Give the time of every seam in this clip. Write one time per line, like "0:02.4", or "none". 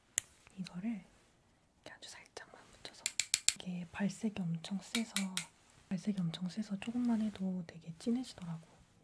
0:03.6